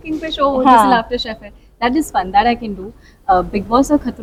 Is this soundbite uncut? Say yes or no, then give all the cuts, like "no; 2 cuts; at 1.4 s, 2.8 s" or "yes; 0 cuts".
yes; 0 cuts